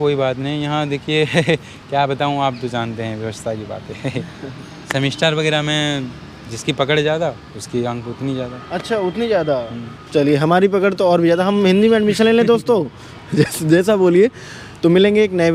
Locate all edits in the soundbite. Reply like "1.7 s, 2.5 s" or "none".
none

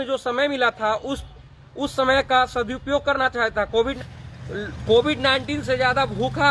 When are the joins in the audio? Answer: 4.0 s

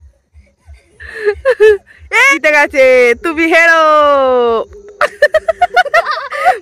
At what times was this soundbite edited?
2.3 s

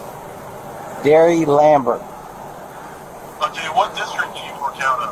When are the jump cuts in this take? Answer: none

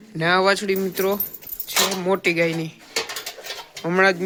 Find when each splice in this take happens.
none

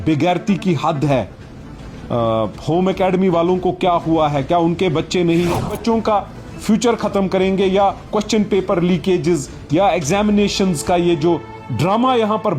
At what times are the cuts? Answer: 5.8 s

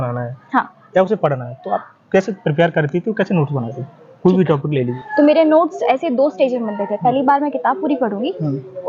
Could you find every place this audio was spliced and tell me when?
5.0 s

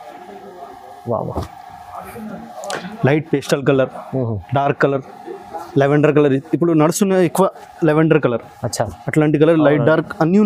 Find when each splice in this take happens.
none

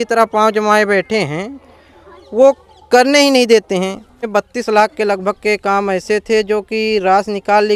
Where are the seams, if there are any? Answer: 4.3 s

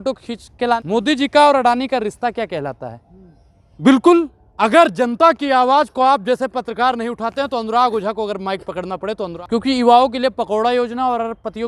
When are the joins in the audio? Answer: 0.8 s, 3.6 s, 9.3 s

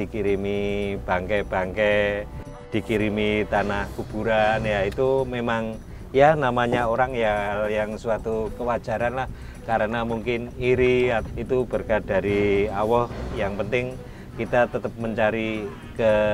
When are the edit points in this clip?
11.3 s, 13.4 s

